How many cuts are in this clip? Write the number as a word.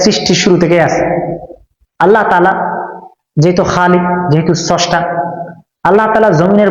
zero